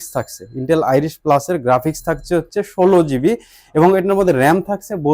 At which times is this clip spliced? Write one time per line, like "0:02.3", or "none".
none